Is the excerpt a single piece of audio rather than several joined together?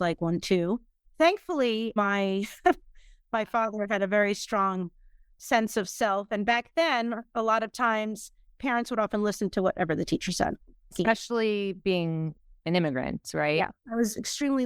yes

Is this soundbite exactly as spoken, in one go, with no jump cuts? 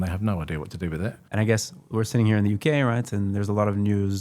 no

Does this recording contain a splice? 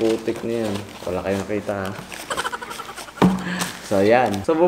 yes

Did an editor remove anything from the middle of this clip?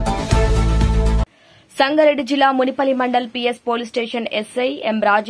yes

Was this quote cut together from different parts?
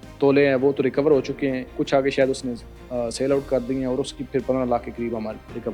yes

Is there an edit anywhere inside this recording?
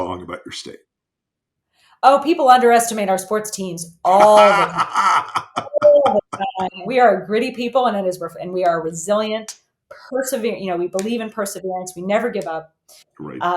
yes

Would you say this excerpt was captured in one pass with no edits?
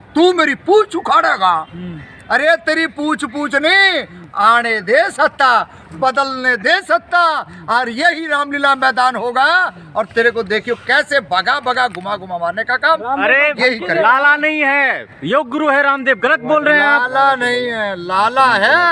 yes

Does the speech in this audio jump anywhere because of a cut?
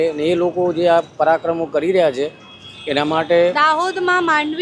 no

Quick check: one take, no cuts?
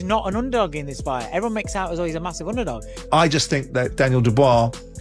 no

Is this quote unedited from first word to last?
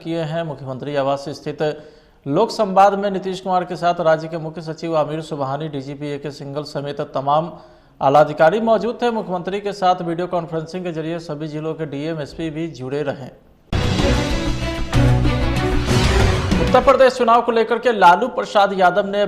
yes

